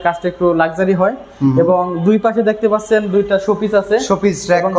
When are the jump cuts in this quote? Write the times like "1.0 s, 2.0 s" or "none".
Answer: none